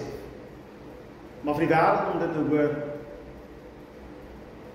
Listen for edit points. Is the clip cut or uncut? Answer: cut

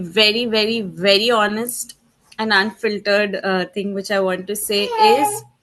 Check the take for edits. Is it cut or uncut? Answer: uncut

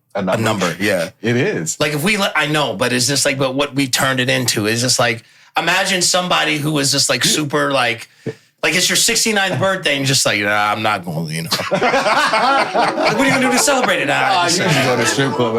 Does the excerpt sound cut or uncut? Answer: uncut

